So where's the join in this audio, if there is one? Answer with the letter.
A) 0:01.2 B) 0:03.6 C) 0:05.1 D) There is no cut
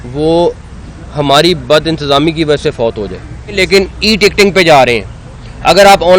B